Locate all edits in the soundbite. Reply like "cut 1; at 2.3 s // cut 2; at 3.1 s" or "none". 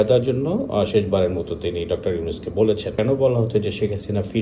cut 1; at 2.9 s